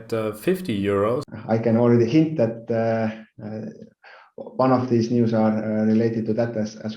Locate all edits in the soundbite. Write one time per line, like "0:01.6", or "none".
0:01.3